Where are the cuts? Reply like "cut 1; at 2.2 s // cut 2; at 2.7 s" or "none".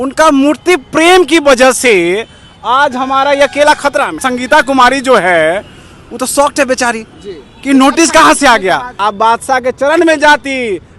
cut 1; at 4.2 s // cut 2; at 8.9 s